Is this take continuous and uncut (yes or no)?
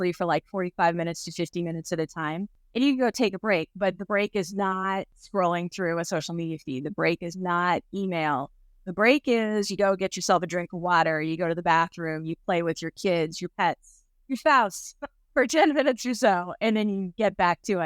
no